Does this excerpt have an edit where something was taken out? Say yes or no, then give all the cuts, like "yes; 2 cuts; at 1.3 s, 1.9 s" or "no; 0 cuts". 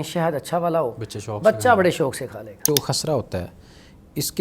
yes; 1 cut; at 2.6 s